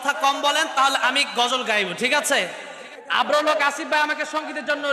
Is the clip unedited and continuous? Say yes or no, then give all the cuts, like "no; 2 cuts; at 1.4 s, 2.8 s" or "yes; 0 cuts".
yes; 0 cuts